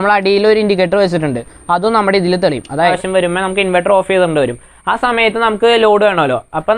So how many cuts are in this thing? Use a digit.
1